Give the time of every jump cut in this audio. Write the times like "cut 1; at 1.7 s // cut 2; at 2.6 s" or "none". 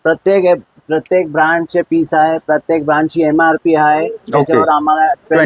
none